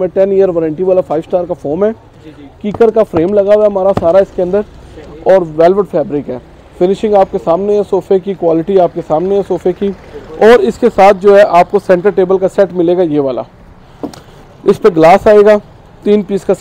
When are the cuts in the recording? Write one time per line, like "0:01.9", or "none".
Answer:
none